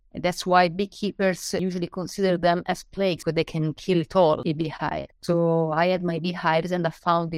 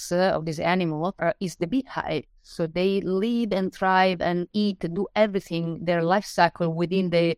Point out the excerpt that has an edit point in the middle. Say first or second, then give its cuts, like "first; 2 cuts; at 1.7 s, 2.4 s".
first; 3 cuts; at 1.6 s, 3.2 s, 4.4 s